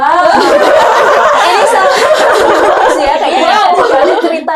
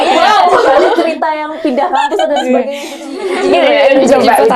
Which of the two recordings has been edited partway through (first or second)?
second